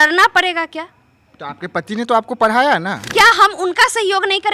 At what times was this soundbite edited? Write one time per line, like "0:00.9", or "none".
0:03.0